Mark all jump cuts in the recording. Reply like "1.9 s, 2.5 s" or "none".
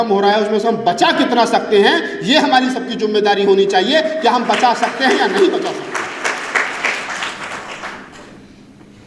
none